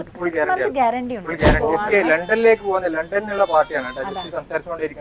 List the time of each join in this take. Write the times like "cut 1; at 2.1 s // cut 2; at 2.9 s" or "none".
cut 1; at 1.6 s